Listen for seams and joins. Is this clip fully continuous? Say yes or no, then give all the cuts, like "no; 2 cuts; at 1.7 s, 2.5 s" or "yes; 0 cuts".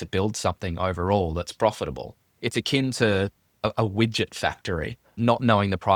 yes; 0 cuts